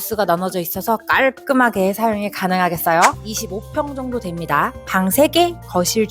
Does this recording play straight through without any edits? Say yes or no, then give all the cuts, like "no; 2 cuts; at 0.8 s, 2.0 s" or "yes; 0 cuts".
no; 1 cut; at 3.3 s